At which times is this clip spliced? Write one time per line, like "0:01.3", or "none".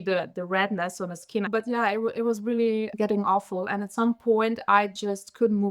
0:01.5
0:02.9